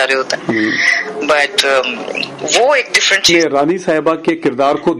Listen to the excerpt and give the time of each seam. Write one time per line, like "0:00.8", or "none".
0:03.3